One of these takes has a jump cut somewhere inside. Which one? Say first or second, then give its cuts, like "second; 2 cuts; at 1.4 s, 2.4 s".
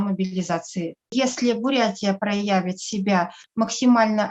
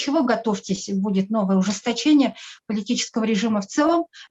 first; 1 cut; at 1.1 s